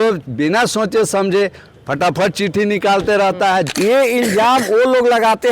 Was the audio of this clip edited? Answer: yes; 1 cut; at 3.7 s

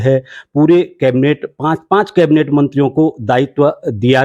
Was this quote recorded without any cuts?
yes; 0 cuts

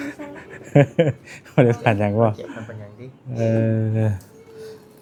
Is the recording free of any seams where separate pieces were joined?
yes; 0 cuts

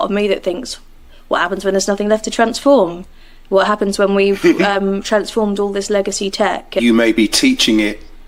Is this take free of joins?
yes; 0 cuts

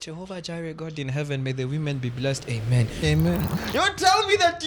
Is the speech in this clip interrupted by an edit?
yes; 1 cut; at 3.3 s

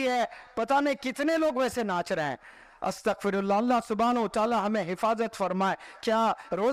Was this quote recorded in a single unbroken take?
yes; 0 cuts

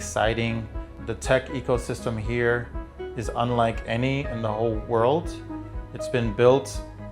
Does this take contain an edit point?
yes; 1 cut; at 0.9 s

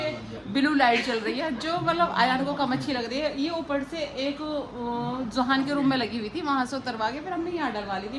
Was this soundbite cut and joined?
no; 0 cuts

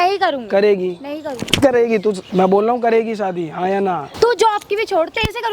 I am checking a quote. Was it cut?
yes; 2 cuts; at 2.2 s, 4.1 s

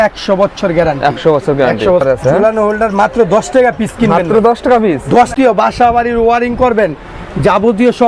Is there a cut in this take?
yes; 2 cuts; at 2.0 s, 5.3 s

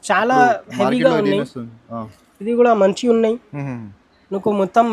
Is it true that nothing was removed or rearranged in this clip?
yes; 0 cuts

